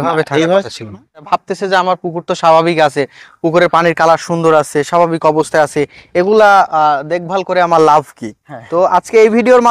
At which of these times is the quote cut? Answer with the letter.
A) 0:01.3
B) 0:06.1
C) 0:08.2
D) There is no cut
A